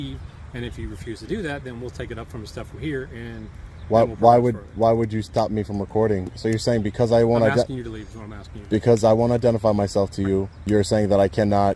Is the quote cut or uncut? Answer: cut